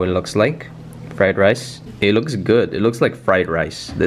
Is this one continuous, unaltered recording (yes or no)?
no